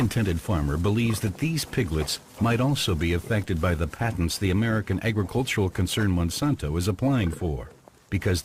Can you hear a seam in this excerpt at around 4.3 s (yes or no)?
no